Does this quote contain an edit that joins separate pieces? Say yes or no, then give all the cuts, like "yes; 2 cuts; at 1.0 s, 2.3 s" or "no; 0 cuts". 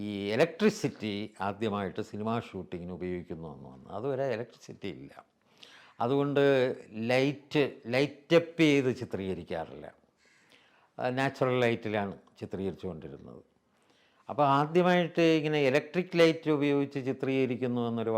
no; 0 cuts